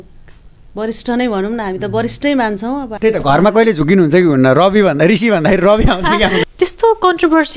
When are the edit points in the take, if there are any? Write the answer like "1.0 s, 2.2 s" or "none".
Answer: 2.9 s, 6.5 s